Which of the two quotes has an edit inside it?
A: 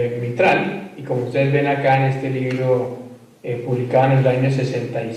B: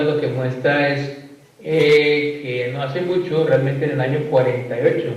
B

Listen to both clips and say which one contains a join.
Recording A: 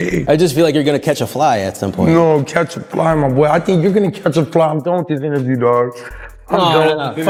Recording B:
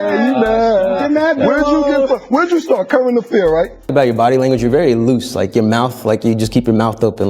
B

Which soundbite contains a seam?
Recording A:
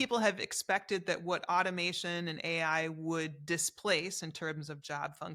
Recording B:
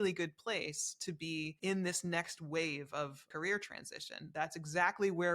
B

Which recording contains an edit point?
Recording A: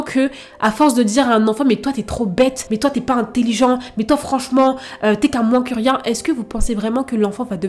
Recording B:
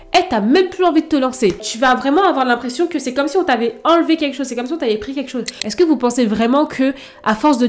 B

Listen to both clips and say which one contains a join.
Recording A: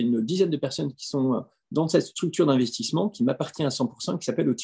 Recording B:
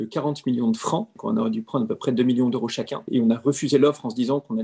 B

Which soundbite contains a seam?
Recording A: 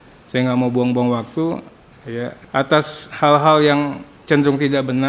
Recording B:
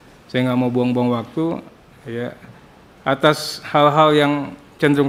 A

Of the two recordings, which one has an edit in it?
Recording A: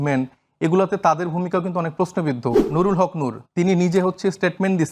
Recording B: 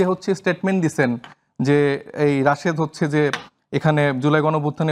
A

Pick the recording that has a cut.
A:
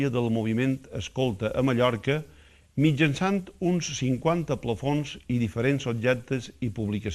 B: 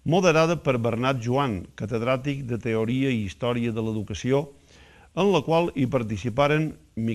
B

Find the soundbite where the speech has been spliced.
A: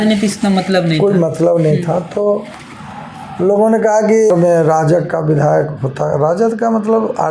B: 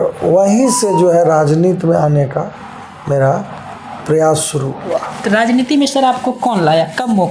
A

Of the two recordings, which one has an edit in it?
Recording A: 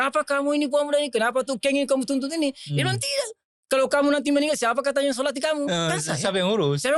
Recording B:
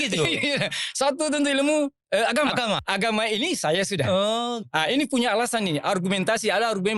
B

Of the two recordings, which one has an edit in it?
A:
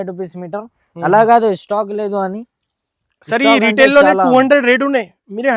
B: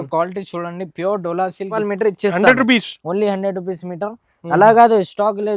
B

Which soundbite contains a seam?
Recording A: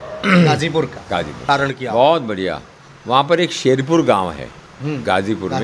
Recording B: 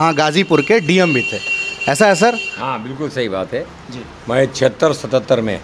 A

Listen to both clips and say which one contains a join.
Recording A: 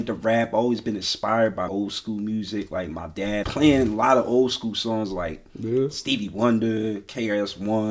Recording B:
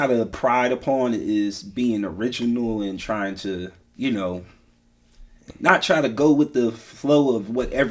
A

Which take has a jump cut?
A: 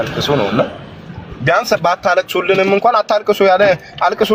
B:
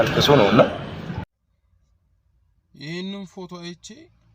B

